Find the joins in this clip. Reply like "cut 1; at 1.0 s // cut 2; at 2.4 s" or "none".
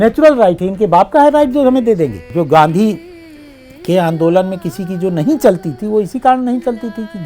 cut 1; at 2.2 s